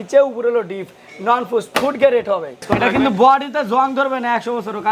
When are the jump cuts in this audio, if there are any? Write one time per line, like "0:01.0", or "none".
0:02.6